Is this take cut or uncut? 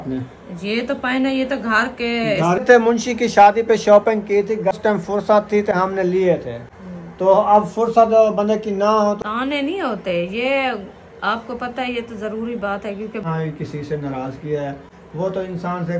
cut